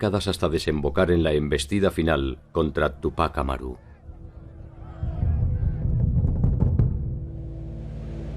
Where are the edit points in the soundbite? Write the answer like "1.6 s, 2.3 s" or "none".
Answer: 7.1 s